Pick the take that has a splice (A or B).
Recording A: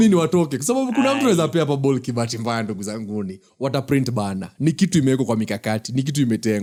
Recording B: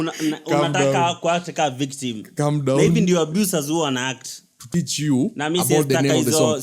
B